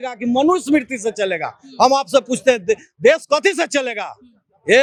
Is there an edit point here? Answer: no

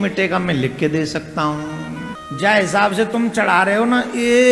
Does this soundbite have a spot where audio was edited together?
yes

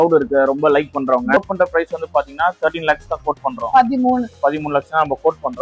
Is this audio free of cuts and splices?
no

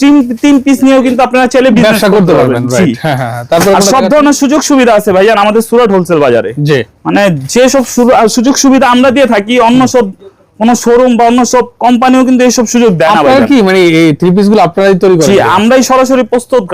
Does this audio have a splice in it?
no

